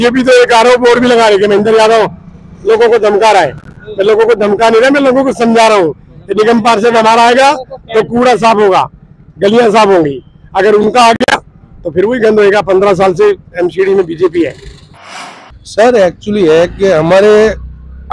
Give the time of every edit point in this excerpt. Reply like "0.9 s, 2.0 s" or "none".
15.0 s